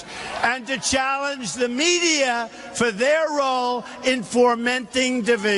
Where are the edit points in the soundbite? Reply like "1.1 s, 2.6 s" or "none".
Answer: 4.5 s